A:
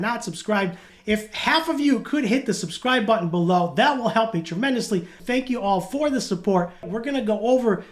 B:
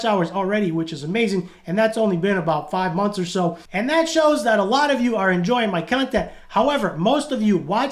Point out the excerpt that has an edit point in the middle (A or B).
A